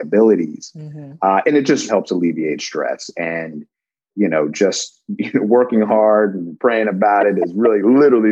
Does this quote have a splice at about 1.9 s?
yes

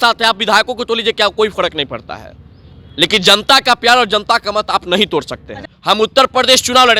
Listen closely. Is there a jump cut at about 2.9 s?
no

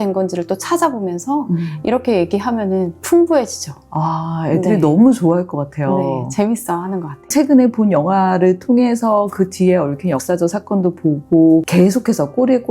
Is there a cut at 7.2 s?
yes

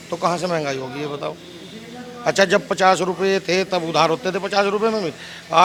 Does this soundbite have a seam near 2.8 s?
no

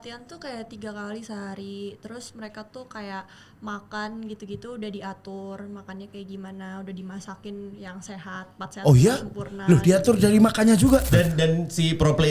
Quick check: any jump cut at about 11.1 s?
yes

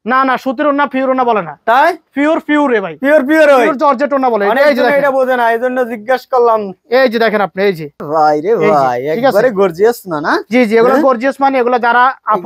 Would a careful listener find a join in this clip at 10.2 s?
no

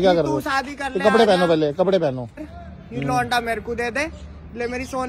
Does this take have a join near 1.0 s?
no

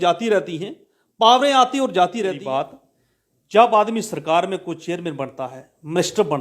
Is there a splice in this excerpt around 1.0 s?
no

